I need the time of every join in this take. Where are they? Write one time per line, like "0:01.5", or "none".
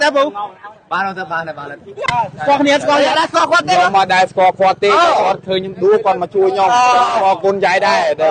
0:02.0

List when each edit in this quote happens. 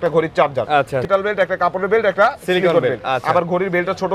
0:01.0

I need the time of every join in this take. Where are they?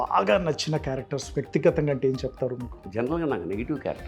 0:02.8

